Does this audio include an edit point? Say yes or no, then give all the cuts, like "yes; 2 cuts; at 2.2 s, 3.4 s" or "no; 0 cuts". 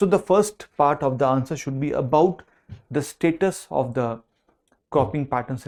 no; 0 cuts